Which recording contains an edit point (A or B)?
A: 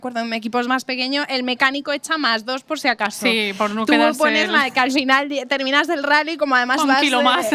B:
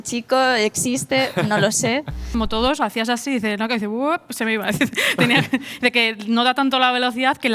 B